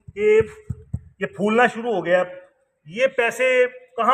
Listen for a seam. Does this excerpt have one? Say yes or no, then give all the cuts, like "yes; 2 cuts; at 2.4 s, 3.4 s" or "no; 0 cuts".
no; 0 cuts